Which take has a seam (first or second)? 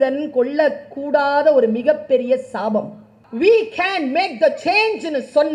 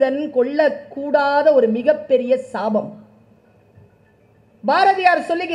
first